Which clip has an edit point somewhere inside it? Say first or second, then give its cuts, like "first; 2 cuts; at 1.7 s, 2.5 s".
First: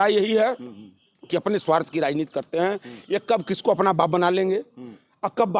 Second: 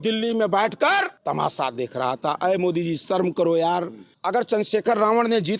second; 2 cuts; at 1.1 s, 4.1 s